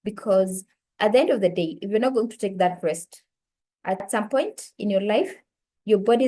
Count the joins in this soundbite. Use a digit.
1